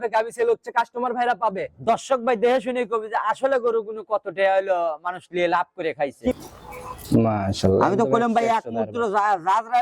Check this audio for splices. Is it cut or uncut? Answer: cut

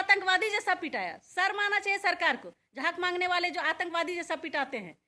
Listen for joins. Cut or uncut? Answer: uncut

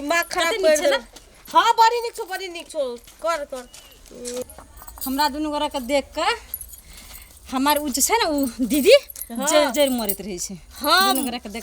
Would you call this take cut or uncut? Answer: cut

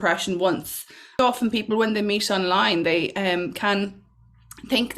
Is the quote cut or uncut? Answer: cut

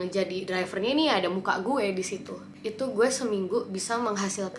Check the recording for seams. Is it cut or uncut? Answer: cut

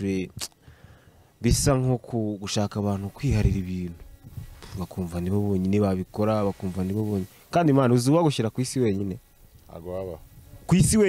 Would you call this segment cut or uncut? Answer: uncut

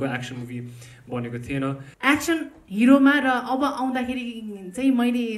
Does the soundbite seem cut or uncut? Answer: cut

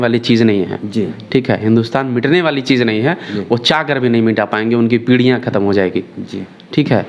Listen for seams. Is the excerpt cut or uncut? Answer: uncut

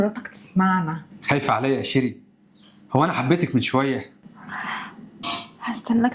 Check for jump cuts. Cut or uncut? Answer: cut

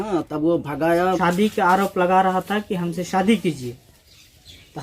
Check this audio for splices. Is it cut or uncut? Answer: cut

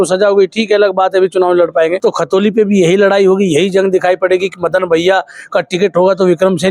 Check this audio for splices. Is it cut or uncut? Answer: cut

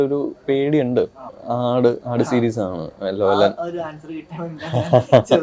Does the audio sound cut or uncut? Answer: cut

